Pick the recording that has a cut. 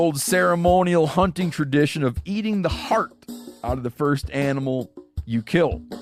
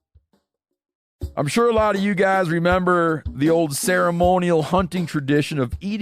second; 1 cut; at 1.2 s

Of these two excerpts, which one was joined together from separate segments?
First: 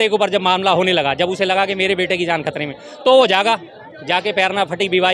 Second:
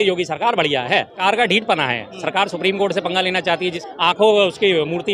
second; 2 cuts; at 1.2 s, 3.8 s

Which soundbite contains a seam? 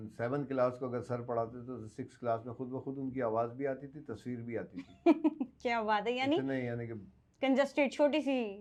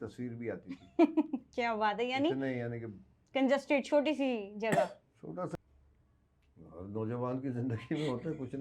second; 1 cut; at 5.5 s

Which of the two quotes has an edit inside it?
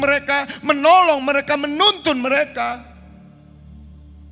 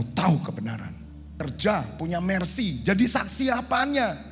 second; 1 cut; at 1.4 s

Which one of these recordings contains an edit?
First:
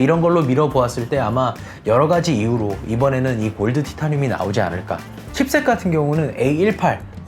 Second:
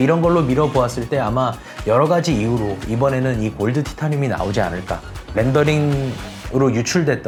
first; 1 cut; at 5.3 s

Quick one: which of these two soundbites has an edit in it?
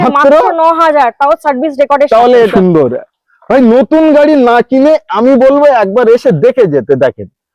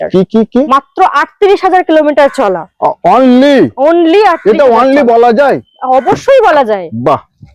first; 1 cut; at 2.5 s

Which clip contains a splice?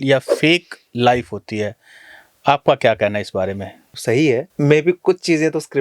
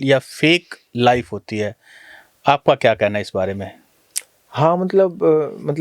first; 2 cuts; at 3.9 s, 4.5 s

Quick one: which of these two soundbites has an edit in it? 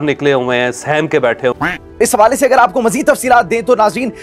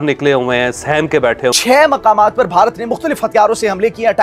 second; 1 cut; at 1.6 s

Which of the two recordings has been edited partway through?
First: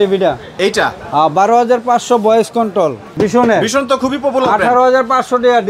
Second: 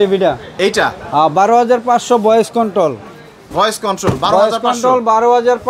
first; 1 cut; at 3.1 s

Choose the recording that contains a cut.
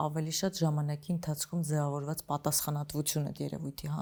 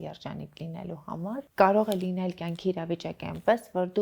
second; 1 cut; at 1.5 s

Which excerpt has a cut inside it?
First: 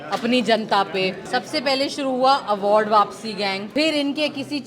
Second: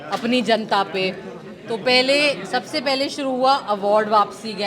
first; 2 cuts; at 1.2 s, 3.6 s

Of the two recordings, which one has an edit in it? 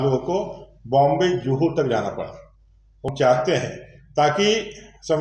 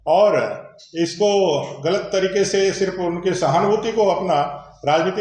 first; 1 cut; at 3.0 s

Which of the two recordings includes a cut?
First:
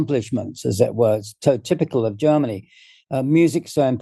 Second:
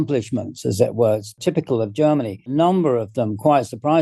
second; 2 cuts; at 1.4 s, 2.5 s

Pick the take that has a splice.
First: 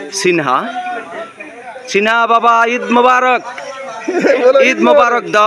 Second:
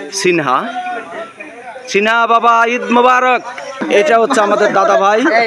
second; 1 cut; at 3.8 s

